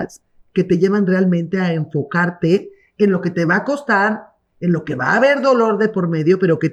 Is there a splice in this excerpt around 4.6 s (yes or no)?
no